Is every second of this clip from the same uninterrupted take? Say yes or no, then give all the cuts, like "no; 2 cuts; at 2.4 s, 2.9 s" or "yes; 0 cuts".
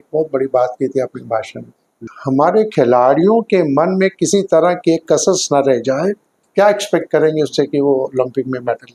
no; 2 cuts; at 2.0 s, 6.4 s